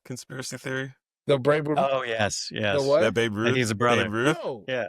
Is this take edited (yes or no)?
no